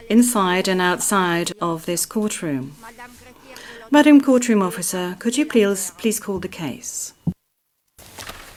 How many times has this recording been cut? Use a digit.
0